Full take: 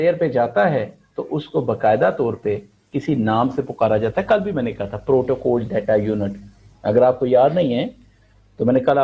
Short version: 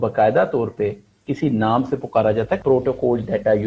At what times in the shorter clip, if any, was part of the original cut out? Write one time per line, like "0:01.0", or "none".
0:02.6